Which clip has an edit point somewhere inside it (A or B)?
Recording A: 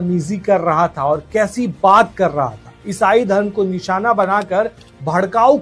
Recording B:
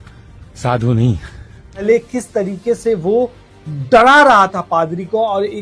B